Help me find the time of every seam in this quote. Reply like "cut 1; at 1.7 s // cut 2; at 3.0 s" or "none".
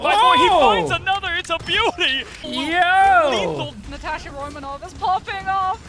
cut 1; at 2.5 s // cut 2; at 3.8 s

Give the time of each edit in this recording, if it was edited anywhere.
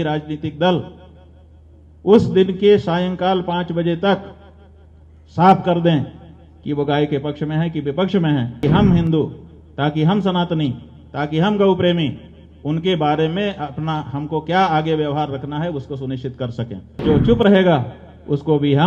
cut 1; at 8.6 s // cut 2; at 17.0 s

